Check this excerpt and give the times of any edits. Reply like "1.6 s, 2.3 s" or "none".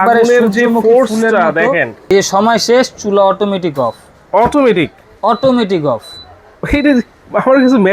2.0 s

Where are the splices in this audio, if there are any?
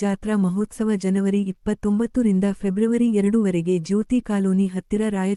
none

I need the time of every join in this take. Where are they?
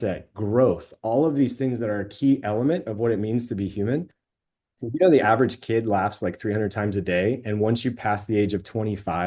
4.5 s

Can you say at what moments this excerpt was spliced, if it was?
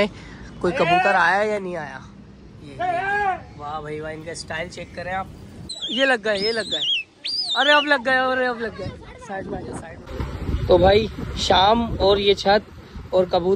5.6 s, 10.1 s

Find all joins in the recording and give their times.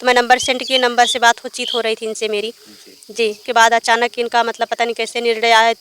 3.4 s

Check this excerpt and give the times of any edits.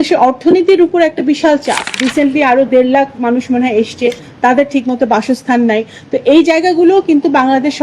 2.0 s

